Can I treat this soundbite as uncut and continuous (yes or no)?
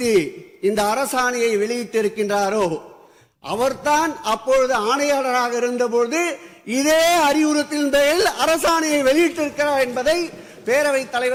yes